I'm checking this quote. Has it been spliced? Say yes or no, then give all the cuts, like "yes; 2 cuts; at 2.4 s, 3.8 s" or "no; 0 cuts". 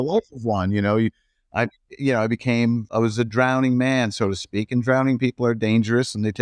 yes; 1 cut; at 2.9 s